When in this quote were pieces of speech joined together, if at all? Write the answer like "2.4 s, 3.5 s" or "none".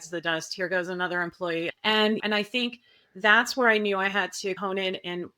1.7 s